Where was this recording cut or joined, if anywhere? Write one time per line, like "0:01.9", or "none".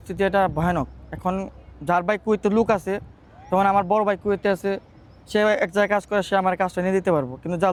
none

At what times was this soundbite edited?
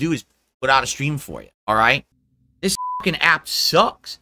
0:02.7

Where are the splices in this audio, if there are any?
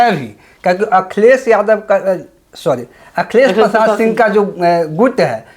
none

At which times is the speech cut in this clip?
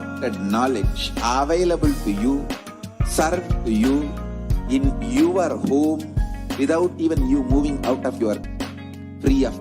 0:08.5

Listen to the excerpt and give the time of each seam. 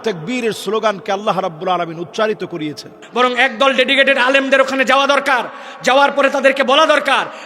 0:03.0

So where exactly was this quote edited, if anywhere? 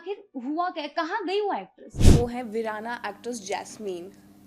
0:02.1

